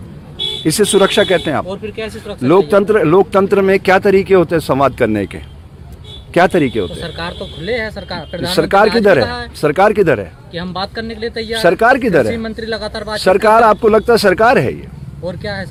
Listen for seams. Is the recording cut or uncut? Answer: uncut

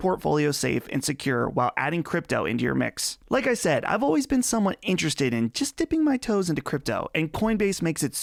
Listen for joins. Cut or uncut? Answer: uncut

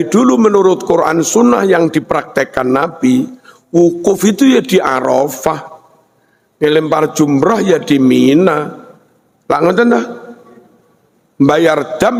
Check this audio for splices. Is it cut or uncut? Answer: uncut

